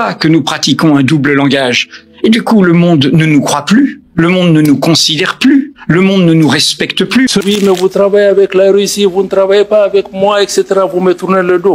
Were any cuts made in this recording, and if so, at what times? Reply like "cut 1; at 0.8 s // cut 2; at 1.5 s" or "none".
cut 1; at 7.4 s